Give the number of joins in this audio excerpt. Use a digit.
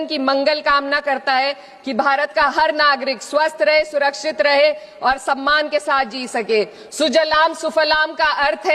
0